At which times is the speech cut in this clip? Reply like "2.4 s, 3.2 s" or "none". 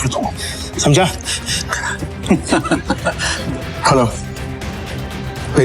3.3 s